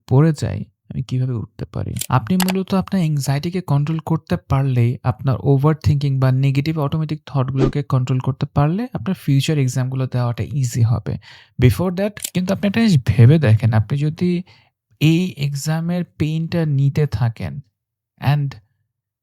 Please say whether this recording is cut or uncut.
cut